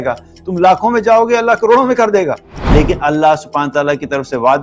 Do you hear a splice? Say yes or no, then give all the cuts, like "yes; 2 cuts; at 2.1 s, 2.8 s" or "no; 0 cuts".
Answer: yes; 1 cut; at 2.5 s